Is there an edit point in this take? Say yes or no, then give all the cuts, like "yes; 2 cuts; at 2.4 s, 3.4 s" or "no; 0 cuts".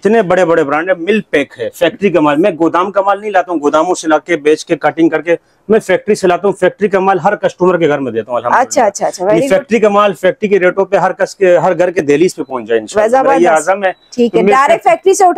no; 0 cuts